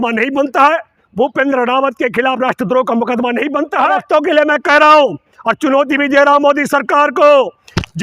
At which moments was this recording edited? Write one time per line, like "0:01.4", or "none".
0:03.9